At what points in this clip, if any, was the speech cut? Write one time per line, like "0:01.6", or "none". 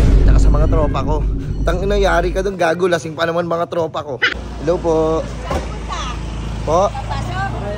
0:04.4